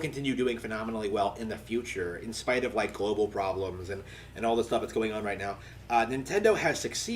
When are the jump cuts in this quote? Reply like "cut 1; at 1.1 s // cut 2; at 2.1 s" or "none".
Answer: cut 1; at 2.2 s

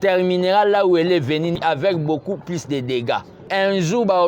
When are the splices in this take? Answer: cut 1; at 1.5 s // cut 2; at 3.5 s

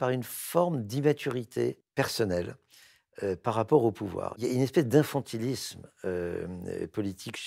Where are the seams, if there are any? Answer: cut 1; at 1.8 s // cut 2; at 4.3 s

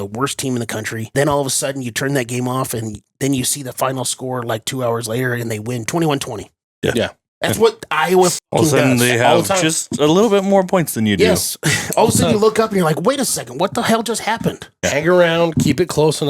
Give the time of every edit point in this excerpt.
cut 1; at 1.1 s // cut 2; at 5.9 s

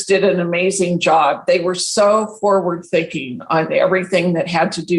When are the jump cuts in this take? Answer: none

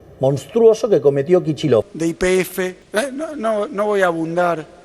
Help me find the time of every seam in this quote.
cut 1; at 1.9 s // cut 2; at 2.8 s

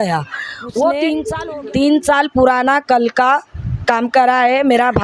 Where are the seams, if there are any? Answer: cut 1; at 1.3 s

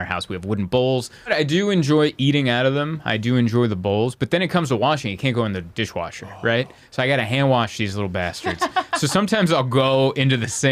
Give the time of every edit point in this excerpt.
cut 1; at 1.3 s

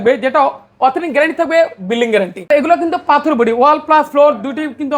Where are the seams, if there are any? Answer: cut 1; at 2.5 s

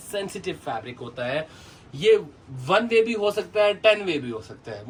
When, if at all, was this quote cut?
none

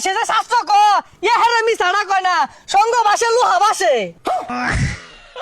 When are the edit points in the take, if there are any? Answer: cut 1; at 4.5 s

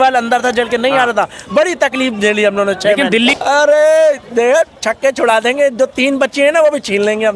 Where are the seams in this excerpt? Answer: cut 1; at 3.3 s

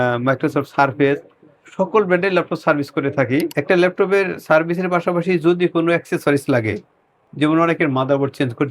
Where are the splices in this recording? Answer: cut 1; at 3.5 s

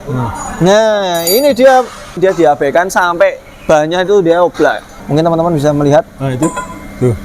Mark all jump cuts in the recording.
cut 1; at 2.2 s // cut 2; at 5.0 s

